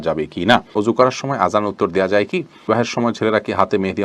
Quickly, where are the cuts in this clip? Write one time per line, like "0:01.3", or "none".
0:01.2
0:02.7